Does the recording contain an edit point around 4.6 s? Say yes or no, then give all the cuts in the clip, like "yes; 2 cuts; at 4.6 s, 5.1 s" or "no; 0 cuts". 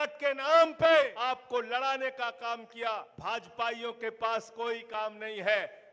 no; 2 cuts; at 1.2 s, 3.1 s